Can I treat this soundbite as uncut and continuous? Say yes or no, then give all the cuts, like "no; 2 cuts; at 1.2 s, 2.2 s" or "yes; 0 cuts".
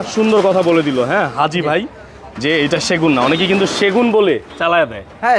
yes; 0 cuts